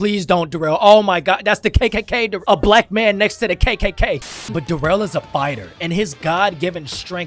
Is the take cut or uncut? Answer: cut